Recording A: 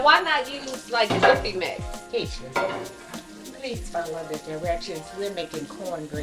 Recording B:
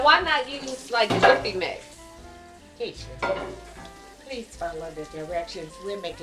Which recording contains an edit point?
A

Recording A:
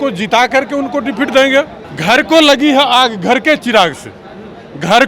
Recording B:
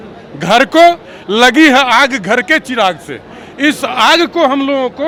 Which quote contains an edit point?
A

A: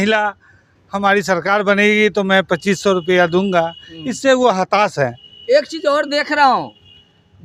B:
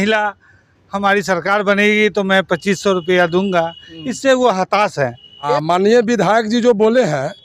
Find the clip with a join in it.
B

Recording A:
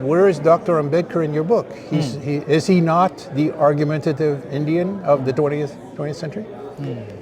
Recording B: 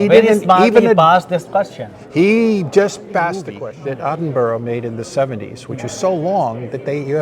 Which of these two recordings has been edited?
B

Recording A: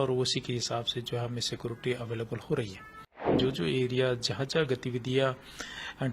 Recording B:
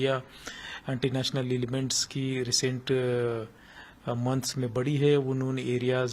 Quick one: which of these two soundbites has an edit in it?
A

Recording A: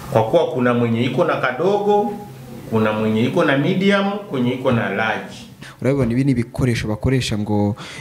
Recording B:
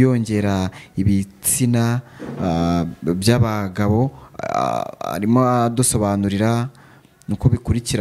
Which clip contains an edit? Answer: A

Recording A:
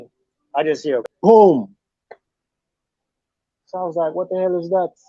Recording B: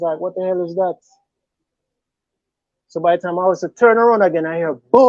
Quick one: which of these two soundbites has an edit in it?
A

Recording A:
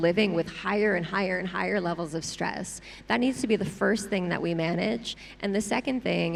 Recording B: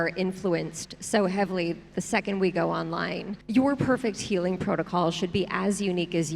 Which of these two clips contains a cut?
B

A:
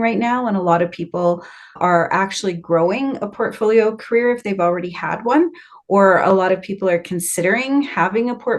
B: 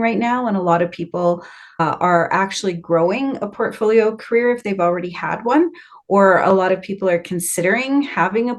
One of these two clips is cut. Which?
A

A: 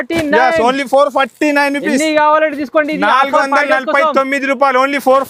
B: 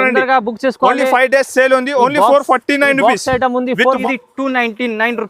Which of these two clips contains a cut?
B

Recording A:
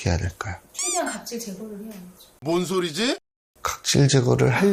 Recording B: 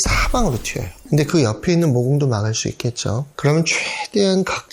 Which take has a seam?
B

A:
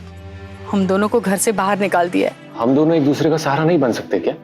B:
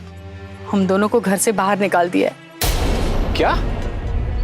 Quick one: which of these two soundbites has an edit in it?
A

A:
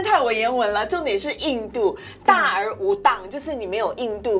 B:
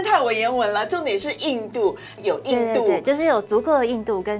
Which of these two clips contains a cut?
B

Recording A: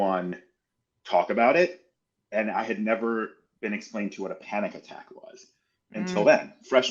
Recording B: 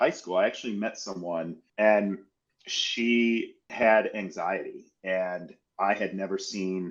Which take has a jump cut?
B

